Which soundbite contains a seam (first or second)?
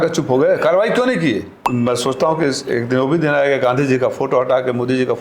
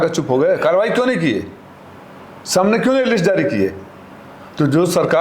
first